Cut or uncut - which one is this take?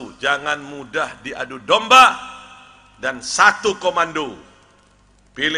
uncut